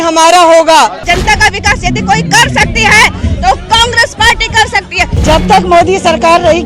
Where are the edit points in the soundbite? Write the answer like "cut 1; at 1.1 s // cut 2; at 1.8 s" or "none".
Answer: cut 1; at 1.0 s // cut 2; at 5.1 s